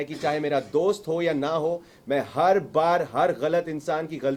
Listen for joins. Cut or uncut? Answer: uncut